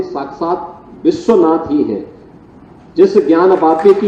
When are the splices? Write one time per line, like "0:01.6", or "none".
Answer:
none

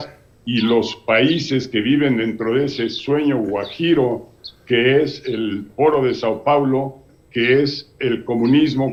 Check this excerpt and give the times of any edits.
none

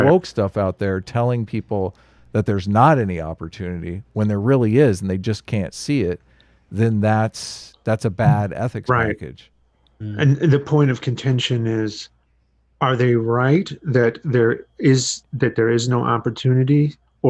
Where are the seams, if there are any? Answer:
none

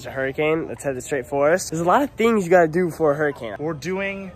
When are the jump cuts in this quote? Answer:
0:01.7
0:03.5

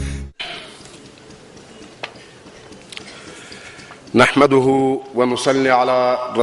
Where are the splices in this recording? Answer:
none

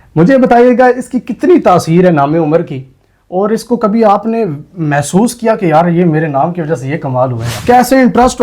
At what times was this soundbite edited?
0:07.5

